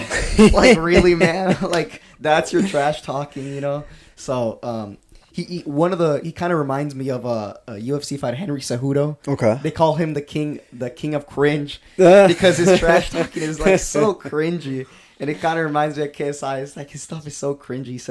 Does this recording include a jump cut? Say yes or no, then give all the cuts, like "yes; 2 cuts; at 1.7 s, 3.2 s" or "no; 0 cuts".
no; 0 cuts